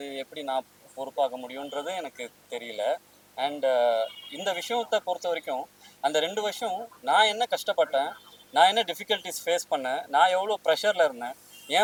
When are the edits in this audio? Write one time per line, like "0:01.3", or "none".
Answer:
none